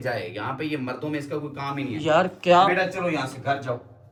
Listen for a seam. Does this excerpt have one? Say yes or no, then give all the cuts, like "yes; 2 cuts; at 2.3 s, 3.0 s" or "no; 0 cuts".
no; 0 cuts